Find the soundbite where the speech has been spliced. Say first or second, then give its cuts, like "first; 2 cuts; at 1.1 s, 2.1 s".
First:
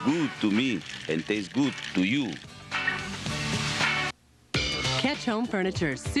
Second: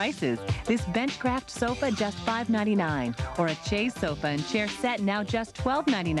first; 1 cut; at 4.0 s